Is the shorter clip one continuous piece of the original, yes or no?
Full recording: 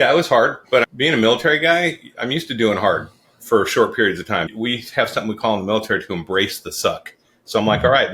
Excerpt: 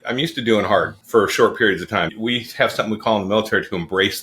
no